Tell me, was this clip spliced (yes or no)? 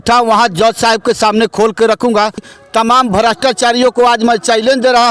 yes